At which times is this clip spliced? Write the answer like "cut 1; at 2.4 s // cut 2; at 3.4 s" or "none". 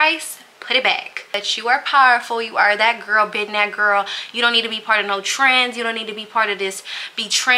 cut 1; at 1.3 s